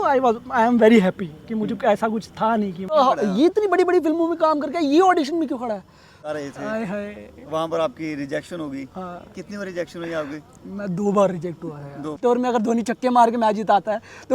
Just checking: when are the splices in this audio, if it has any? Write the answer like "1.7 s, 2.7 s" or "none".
2.9 s, 6.3 s, 12.4 s